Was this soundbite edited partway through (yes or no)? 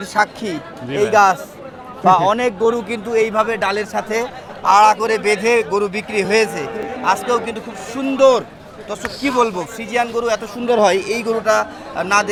no